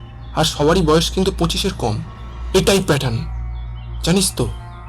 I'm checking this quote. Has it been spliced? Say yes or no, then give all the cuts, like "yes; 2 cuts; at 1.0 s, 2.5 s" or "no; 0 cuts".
yes; 1 cut; at 2.1 s